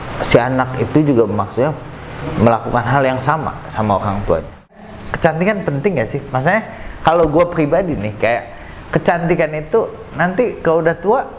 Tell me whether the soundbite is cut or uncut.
cut